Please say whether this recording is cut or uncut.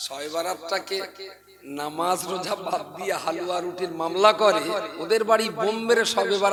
uncut